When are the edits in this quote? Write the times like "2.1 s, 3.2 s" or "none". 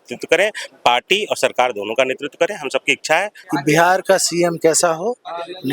3.4 s